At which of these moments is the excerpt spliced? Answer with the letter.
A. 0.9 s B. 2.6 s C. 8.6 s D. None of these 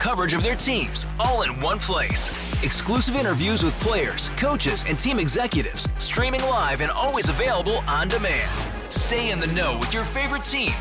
D